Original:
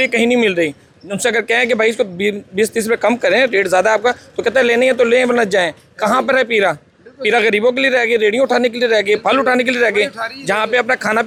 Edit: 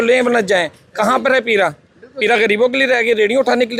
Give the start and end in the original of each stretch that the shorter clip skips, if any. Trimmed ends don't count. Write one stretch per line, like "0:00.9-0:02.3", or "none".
none